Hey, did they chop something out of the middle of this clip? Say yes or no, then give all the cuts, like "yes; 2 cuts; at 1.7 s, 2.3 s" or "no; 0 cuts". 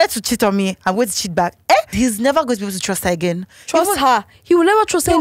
yes; 1 cut; at 1.9 s